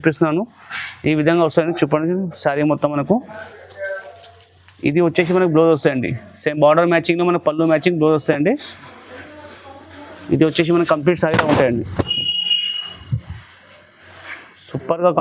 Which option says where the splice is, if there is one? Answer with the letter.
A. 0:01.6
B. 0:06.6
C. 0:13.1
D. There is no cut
D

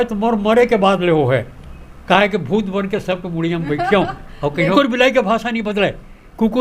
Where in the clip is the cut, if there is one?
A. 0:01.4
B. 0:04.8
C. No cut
B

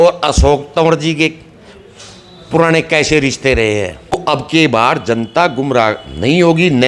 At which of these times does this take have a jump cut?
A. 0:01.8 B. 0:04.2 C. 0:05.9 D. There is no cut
B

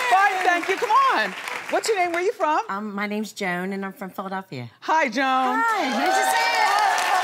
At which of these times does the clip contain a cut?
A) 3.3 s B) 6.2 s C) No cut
A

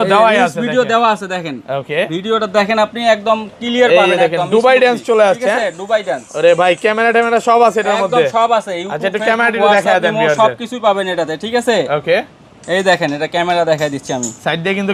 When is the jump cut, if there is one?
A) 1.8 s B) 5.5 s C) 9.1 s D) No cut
D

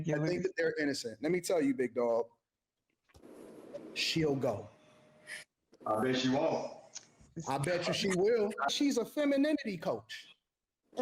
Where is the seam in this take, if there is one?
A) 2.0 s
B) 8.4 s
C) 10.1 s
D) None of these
B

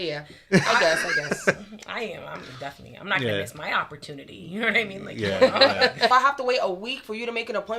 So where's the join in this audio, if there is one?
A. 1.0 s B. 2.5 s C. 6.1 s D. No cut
C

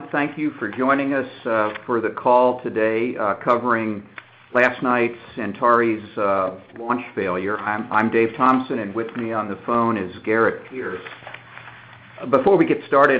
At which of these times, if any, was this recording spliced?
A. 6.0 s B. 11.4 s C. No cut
B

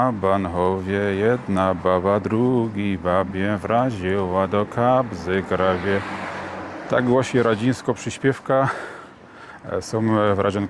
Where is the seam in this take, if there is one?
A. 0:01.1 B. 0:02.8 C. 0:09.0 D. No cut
D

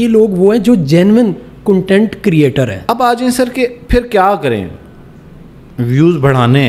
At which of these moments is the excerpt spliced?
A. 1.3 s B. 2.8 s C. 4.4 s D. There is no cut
B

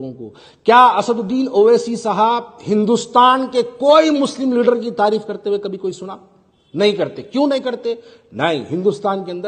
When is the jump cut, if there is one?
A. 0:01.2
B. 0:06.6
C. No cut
C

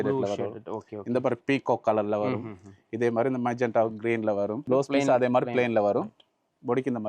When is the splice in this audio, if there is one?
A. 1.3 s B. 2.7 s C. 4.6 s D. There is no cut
C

